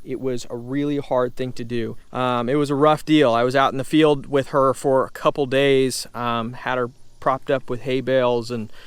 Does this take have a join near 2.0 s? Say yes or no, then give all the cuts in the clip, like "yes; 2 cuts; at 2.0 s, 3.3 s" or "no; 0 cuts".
yes; 1 cut; at 2.0 s